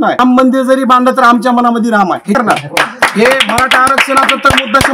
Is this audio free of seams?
no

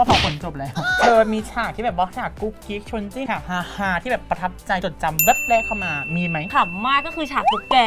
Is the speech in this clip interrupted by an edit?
yes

